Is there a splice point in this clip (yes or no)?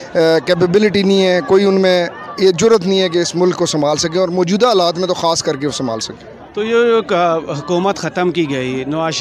no